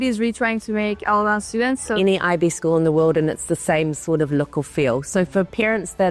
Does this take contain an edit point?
yes; 1 cut; at 1.9 s

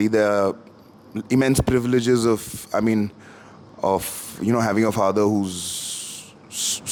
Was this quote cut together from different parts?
no; 0 cuts

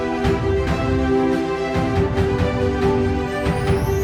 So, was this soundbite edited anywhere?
no; 0 cuts

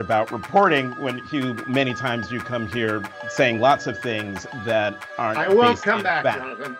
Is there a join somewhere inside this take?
no; 0 cuts

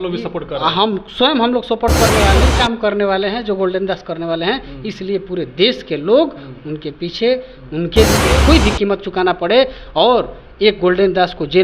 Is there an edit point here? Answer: yes; 2 cuts; at 2.5 s, 8.2 s

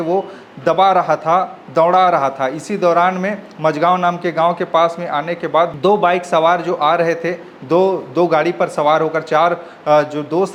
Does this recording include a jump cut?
no; 0 cuts

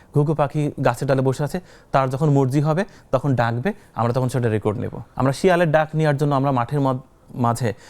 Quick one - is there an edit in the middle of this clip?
yes; 1 cut; at 5.0 s

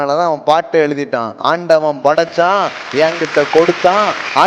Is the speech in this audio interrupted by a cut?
no; 0 cuts

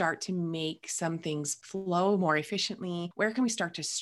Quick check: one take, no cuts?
no; 2 cuts; at 1.6 s, 3.1 s

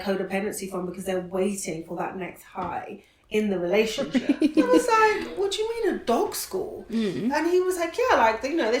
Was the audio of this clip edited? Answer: yes; 1 cut; at 4.2 s

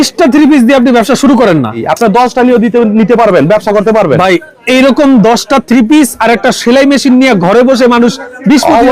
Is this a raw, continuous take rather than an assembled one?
no; 1 cut; at 1.8 s

